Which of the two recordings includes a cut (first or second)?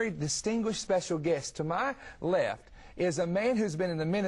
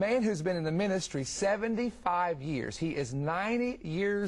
second